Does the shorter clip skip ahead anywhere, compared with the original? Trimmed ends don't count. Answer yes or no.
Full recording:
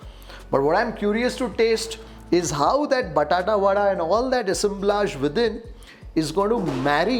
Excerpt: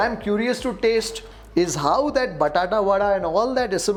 no